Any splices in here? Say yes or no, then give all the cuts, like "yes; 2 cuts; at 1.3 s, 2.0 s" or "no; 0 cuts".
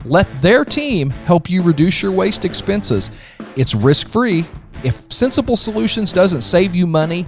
no; 0 cuts